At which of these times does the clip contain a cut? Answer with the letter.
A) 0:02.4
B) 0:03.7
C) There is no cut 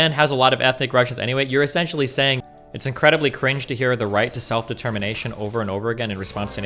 A